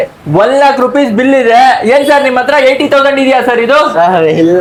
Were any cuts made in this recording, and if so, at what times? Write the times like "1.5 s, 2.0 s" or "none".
none